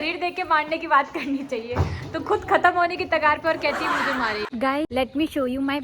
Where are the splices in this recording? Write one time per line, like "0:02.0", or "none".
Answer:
0:04.9

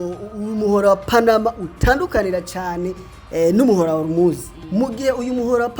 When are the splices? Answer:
0:04.5

